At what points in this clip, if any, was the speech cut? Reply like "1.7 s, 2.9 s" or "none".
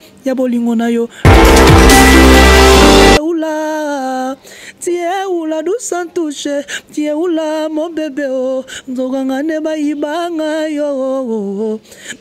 1.1 s, 3.2 s